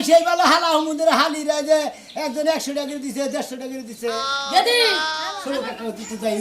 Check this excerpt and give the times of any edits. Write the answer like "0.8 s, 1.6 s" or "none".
5.3 s